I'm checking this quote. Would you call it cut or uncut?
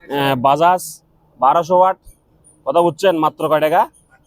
uncut